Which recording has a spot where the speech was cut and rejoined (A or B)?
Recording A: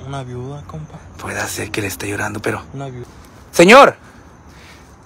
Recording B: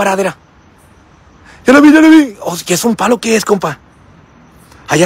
A